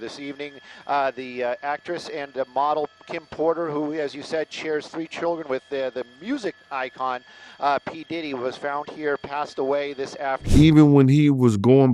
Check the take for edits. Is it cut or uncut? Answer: cut